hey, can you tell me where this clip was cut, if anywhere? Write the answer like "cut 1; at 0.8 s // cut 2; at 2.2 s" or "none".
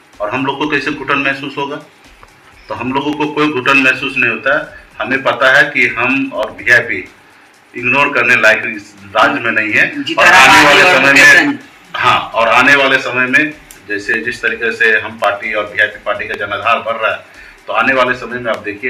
none